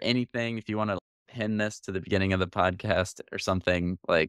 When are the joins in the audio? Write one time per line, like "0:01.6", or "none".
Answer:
none